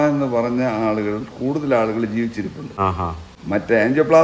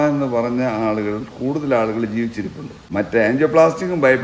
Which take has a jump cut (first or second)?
second